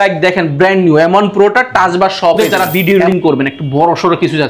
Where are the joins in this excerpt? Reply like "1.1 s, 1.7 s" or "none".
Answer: 2.4 s